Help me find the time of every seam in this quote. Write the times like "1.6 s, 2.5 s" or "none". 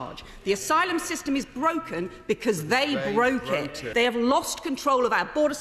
3.8 s